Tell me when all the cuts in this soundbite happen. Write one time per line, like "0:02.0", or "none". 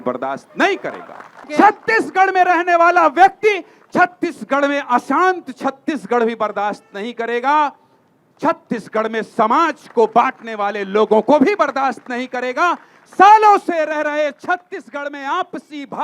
0:01.5